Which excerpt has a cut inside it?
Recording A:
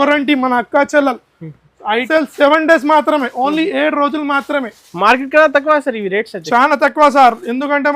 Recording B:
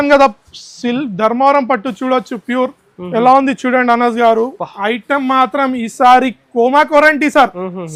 A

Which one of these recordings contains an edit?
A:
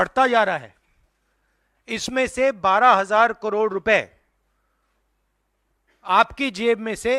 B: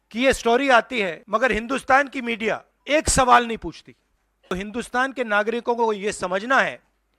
B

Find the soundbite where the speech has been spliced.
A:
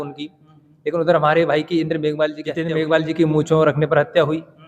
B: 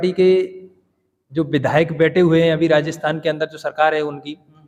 A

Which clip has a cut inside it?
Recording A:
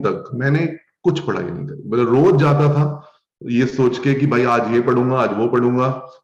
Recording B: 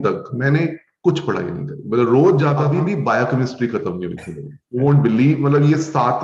B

